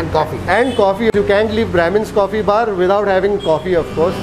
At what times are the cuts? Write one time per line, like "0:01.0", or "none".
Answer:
0:01.1